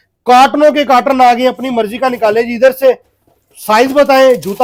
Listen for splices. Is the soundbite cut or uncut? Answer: uncut